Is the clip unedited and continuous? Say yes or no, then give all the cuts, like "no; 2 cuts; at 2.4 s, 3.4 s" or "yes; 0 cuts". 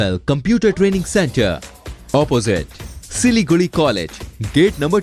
yes; 0 cuts